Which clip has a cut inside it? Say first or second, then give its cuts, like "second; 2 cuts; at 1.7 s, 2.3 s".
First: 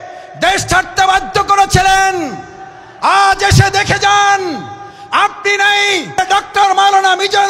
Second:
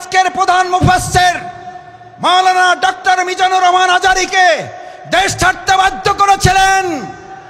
first; 1 cut; at 6.2 s